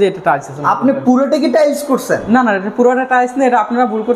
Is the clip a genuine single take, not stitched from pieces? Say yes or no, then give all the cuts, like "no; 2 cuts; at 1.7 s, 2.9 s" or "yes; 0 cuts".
yes; 0 cuts